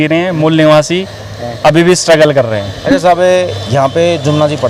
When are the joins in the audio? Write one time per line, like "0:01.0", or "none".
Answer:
none